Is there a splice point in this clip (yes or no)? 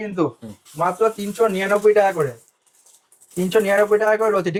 no